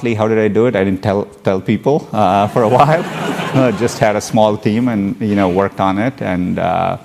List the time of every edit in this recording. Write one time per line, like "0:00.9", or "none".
none